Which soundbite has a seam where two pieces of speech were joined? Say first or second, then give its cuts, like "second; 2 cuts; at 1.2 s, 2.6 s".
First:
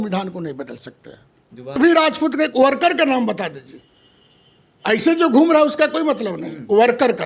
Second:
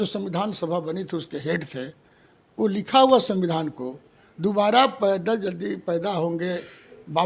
first; 1 cut; at 1.7 s